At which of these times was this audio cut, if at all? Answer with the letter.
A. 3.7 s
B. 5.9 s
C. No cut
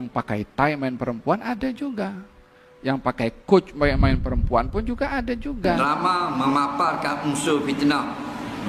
B